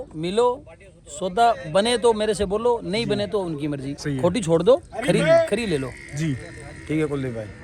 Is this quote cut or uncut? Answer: uncut